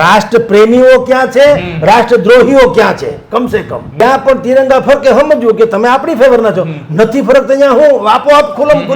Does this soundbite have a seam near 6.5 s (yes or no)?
no